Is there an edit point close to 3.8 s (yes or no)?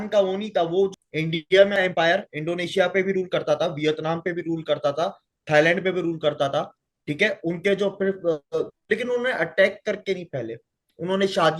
no